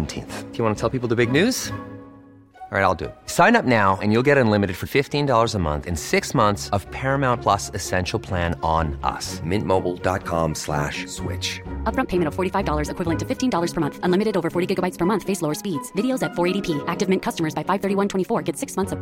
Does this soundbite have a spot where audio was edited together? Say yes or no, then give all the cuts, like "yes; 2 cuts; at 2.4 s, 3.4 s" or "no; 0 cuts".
no; 0 cuts